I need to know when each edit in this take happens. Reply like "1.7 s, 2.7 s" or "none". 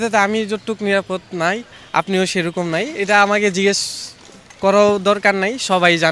none

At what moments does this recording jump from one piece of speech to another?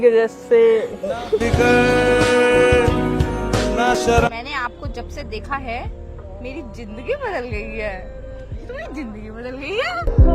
4.4 s

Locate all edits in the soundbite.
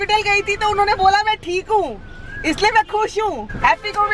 none

